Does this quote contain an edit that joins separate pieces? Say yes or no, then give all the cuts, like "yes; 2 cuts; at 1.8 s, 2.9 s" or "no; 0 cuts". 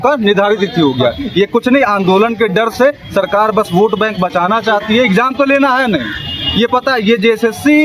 no; 0 cuts